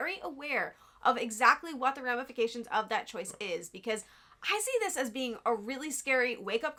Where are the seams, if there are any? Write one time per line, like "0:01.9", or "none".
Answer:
none